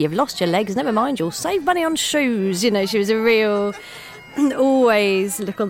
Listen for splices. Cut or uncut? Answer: uncut